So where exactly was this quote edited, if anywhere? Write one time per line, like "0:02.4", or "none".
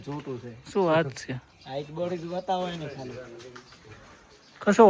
0:02.8